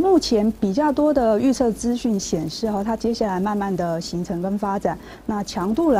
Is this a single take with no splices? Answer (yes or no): yes